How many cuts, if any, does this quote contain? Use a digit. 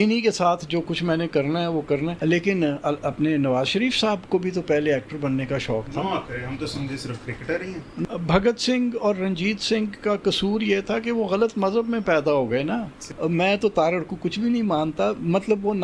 3